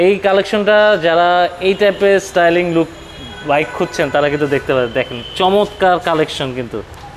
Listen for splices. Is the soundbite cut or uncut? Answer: uncut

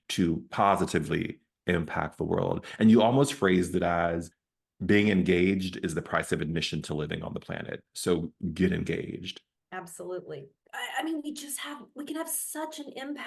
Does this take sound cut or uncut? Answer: cut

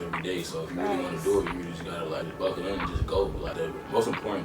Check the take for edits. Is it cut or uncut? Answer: cut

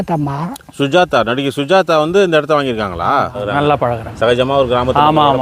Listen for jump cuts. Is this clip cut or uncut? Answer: cut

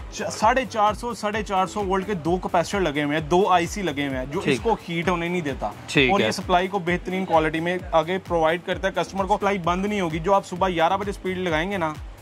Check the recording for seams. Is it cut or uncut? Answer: cut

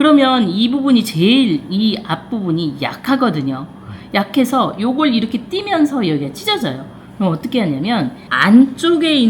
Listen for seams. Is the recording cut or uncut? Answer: uncut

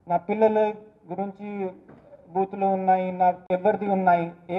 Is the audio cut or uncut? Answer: cut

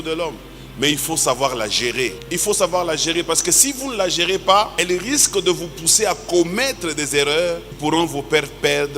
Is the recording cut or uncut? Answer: cut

